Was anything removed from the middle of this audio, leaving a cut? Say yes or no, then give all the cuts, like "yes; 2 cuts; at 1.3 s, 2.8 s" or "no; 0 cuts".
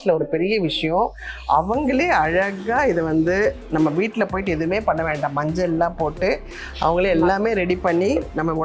no; 0 cuts